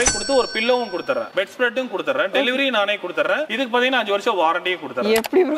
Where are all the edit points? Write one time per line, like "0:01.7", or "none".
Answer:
none